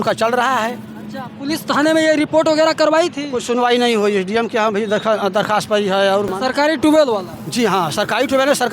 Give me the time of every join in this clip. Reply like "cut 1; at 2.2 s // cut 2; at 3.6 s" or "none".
cut 1; at 6.3 s